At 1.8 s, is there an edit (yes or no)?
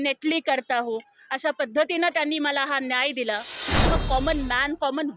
no